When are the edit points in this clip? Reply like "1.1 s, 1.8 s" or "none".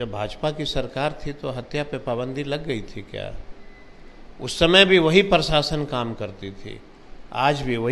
none